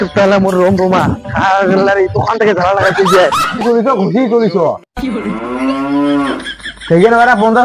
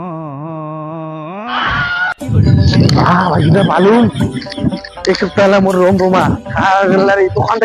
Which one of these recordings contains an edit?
first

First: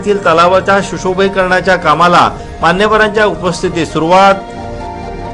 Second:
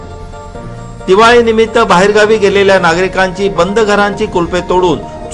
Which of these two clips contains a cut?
second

